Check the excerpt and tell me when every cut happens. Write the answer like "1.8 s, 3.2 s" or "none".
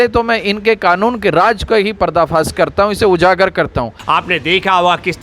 4.0 s